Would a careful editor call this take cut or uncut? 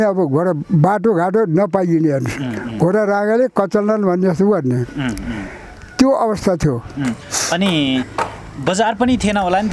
uncut